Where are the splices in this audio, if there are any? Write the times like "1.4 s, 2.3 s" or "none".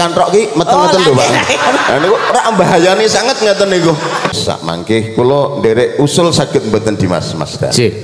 4.4 s